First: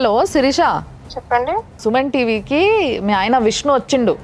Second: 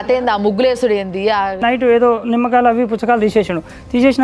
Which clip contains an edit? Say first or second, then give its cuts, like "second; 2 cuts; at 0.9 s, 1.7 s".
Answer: second; 1 cut; at 1.6 s